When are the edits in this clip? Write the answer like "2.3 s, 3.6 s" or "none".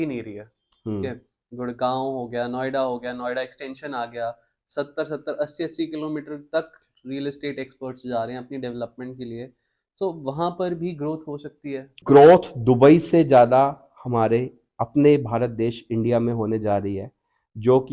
12.0 s